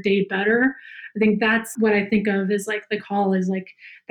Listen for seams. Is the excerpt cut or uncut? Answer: cut